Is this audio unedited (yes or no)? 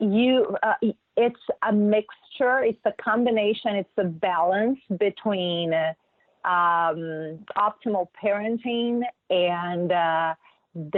yes